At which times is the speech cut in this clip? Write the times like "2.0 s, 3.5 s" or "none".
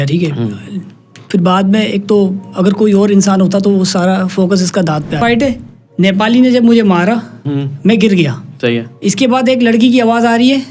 5.2 s